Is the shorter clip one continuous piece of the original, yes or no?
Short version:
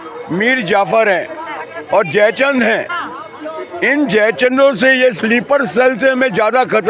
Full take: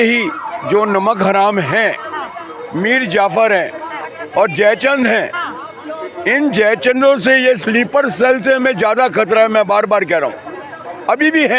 yes